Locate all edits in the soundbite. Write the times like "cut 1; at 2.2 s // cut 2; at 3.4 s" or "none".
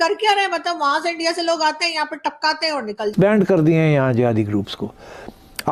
cut 1; at 3.1 s